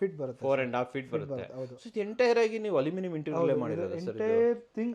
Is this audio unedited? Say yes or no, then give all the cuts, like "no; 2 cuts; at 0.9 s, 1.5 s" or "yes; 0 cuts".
yes; 0 cuts